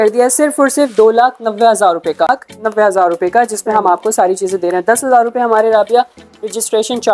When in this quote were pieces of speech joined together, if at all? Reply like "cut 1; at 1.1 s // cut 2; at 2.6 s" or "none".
cut 1; at 2.3 s